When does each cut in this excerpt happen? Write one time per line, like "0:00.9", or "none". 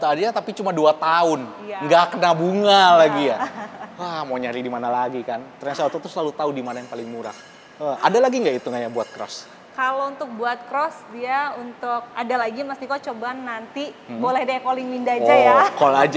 none